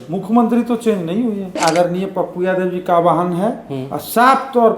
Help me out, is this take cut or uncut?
cut